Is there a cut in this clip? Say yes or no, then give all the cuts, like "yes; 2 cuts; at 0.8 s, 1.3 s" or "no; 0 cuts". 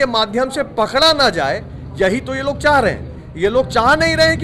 no; 0 cuts